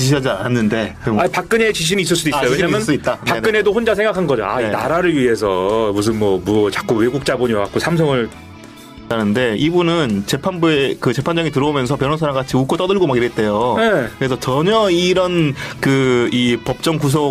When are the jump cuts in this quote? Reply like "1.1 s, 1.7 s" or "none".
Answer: 8.8 s

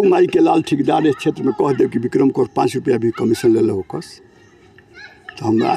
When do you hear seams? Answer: none

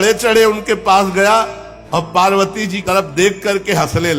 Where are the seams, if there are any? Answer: none

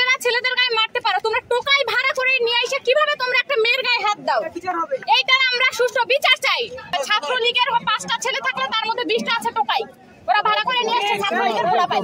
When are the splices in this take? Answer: 6.9 s

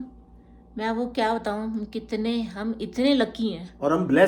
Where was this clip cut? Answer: none

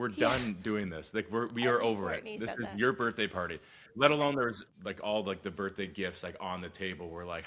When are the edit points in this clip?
4.7 s

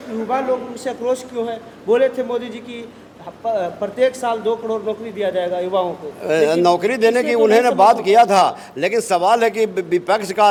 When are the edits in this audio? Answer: none

